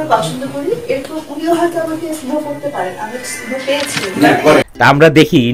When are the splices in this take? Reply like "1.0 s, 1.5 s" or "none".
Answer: 4.6 s